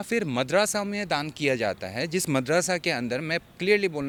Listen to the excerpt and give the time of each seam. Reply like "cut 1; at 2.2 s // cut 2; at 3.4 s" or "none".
none